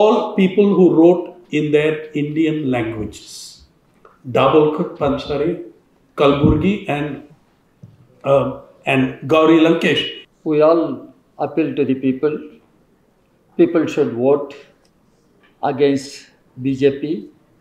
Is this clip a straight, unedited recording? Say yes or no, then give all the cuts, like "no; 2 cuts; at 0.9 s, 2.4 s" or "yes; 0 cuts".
no; 1 cut; at 10.2 s